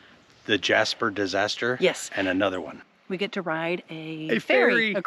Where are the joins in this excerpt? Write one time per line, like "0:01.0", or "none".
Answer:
0:02.7